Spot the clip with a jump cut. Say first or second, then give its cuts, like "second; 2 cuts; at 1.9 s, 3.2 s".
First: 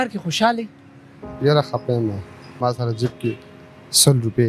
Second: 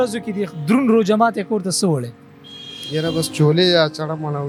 first; 1 cut; at 2.5 s